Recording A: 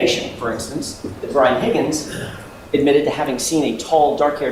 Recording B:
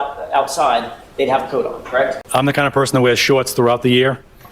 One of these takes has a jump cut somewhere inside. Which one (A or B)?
B